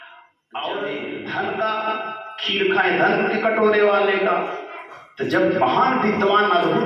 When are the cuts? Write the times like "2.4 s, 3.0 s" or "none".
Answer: 1.0 s